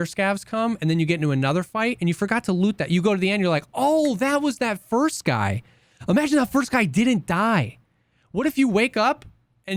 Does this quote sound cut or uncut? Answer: uncut